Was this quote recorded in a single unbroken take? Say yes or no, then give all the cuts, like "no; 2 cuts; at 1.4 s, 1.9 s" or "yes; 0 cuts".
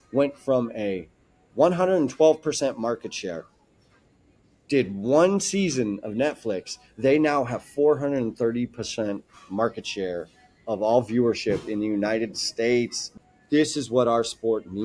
no; 1 cut; at 13.0 s